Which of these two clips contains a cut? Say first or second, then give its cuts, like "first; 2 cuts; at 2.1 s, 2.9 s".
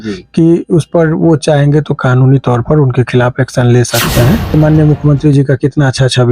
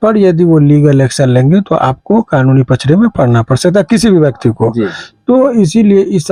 first; 1 cut; at 4.6 s